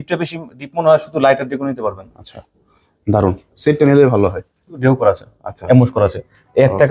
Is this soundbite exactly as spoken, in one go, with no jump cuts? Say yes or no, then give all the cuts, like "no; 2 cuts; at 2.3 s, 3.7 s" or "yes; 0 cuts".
no; 1 cut; at 4.6 s